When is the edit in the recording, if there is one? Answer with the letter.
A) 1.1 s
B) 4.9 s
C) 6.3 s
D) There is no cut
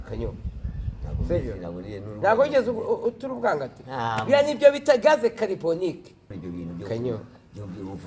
C